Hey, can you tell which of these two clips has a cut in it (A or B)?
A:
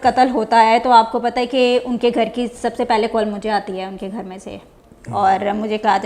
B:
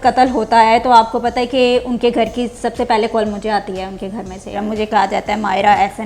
B